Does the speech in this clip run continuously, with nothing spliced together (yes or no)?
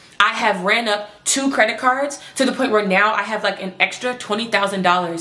yes